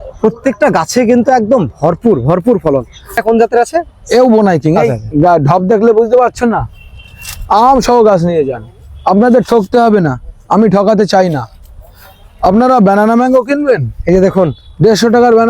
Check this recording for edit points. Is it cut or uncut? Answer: cut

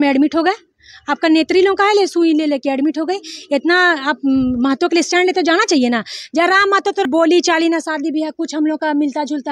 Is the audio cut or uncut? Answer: cut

